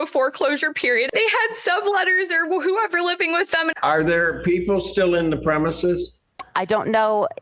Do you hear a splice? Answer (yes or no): yes